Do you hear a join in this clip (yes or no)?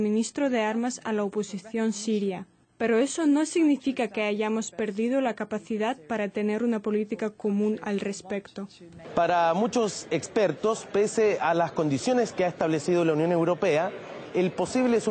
no